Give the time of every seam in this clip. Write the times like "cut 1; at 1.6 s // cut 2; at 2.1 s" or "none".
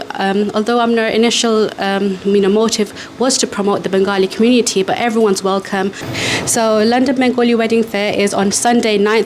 cut 1; at 6.0 s